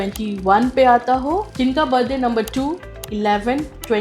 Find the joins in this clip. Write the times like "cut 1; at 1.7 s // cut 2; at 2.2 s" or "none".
cut 1; at 1.5 s